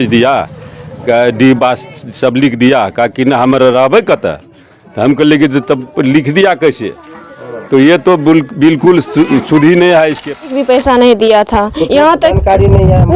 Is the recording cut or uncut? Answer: cut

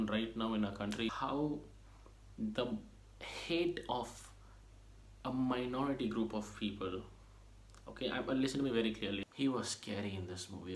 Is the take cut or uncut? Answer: cut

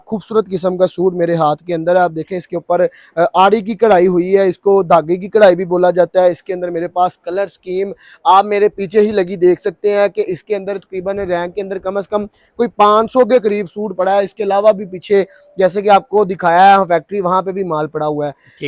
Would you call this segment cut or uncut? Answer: uncut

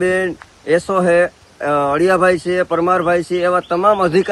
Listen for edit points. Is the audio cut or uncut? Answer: uncut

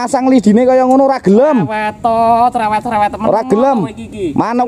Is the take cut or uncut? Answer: uncut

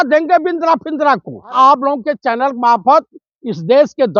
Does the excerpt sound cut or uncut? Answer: cut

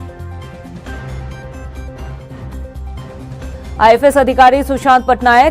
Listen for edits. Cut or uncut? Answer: cut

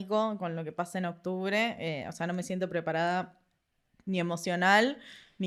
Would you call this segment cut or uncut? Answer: uncut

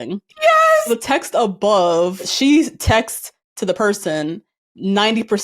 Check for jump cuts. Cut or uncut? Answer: cut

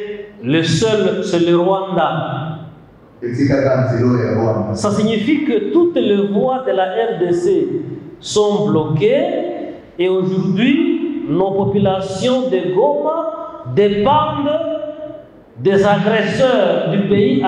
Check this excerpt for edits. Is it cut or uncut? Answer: uncut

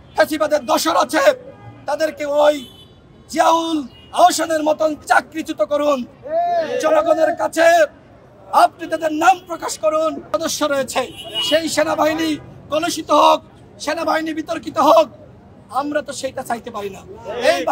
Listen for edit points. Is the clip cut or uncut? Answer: cut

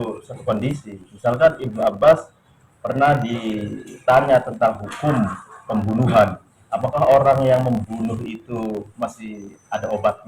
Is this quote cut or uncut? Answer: uncut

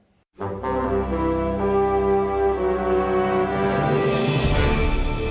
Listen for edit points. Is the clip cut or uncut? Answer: cut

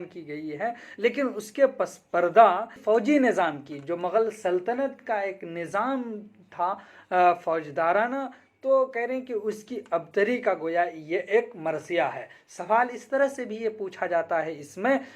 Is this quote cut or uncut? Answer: cut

